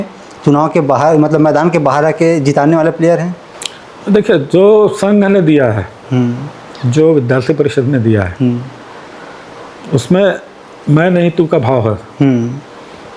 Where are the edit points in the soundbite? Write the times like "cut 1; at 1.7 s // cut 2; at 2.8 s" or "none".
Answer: none